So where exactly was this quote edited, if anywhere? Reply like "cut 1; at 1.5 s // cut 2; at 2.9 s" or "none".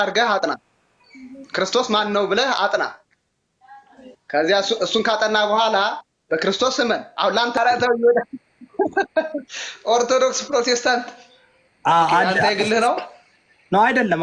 cut 1; at 7.6 s